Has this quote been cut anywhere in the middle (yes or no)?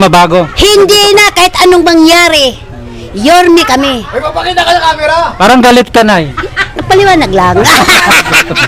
no